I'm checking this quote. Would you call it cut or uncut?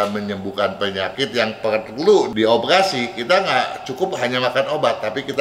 cut